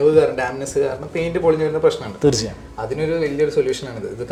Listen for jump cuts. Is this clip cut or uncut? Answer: uncut